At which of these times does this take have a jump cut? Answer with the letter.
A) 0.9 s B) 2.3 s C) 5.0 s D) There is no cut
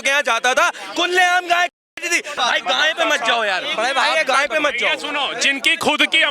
B